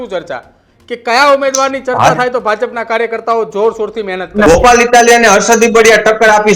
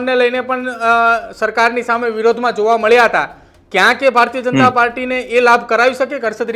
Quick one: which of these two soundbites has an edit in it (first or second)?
first